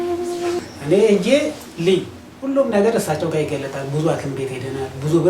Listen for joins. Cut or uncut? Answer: cut